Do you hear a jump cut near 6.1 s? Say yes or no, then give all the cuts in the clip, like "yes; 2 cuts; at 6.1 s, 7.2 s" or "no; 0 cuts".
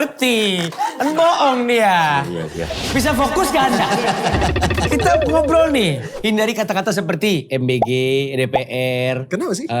yes; 1 cut; at 6.1 s